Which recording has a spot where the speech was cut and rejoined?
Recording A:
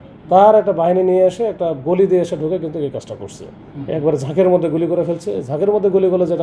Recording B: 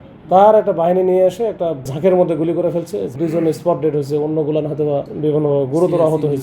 B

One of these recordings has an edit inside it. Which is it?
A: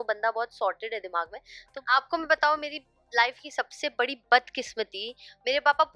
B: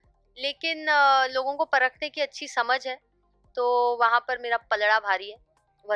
A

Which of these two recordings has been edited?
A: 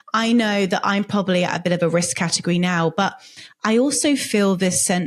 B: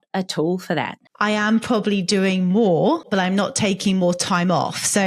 B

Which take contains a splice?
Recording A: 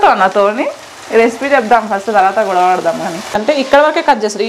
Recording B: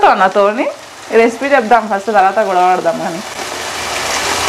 A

